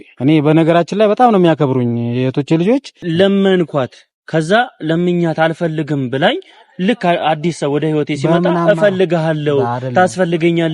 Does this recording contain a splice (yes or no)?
yes